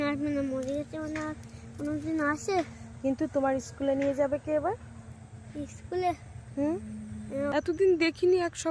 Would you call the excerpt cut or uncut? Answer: cut